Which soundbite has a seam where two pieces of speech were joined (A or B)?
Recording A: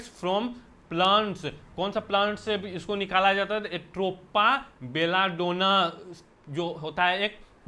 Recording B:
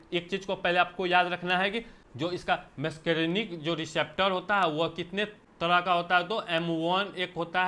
B